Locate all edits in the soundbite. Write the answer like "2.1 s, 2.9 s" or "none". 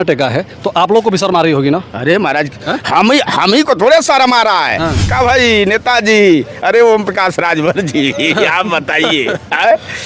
5.1 s